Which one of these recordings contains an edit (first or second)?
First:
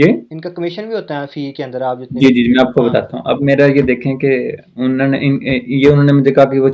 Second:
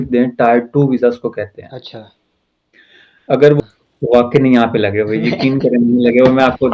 second